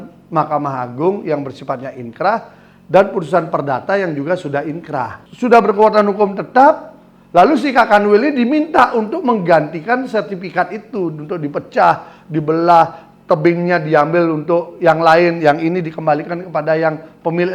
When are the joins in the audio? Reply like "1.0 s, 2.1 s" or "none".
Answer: 5.2 s